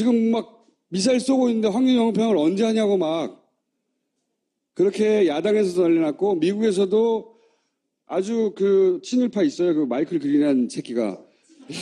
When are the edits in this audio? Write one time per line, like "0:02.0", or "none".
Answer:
0:08.4